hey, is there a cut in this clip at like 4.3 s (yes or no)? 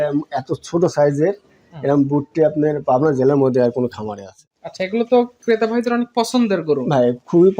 yes